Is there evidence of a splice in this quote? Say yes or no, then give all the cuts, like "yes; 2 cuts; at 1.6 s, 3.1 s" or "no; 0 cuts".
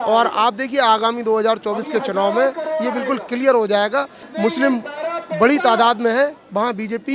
yes; 1 cut; at 4.2 s